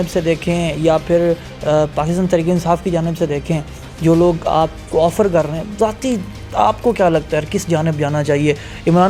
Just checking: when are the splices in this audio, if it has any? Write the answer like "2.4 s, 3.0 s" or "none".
none